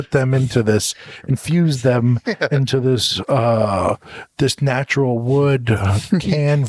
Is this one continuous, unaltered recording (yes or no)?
yes